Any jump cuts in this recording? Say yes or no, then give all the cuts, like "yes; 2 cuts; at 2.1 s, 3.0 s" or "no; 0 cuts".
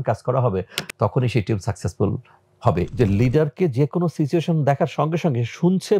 yes; 1 cut; at 2.9 s